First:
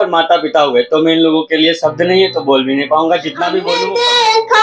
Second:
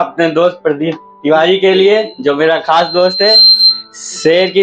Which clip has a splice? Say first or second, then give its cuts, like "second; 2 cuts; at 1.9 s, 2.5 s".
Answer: first; 1 cut; at 3.7 s